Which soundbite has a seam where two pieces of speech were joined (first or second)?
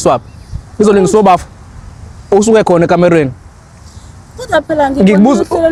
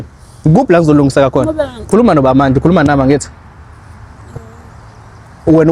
second